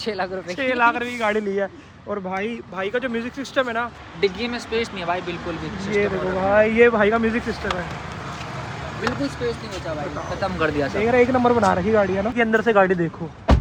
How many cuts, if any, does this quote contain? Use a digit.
0